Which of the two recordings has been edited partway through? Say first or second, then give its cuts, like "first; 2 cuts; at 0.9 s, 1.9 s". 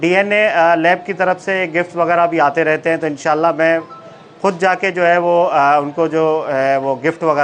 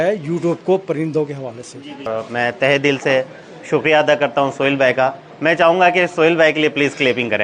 second; 1 cut; at 2.1 s